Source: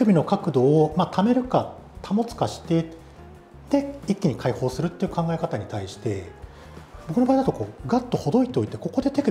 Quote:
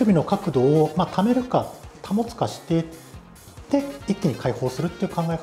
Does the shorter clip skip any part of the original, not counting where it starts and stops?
no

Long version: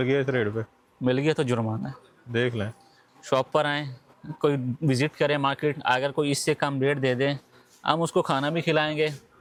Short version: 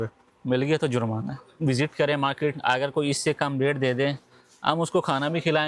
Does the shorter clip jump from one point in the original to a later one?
yes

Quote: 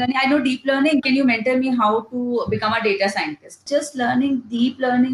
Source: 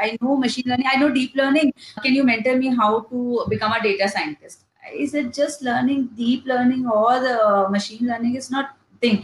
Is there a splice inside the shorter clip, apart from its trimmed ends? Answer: yes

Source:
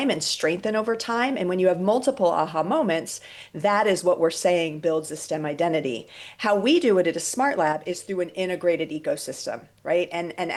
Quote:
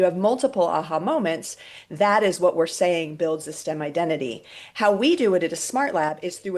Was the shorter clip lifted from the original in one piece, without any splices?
yes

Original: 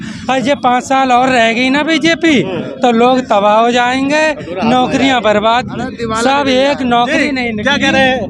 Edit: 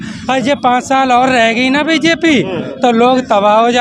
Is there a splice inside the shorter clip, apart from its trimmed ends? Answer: no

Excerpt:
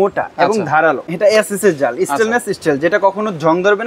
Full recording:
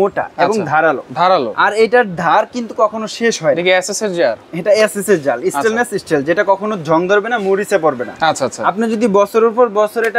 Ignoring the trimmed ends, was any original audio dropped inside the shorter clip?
yes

